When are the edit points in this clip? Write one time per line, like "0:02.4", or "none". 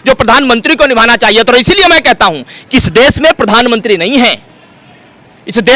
none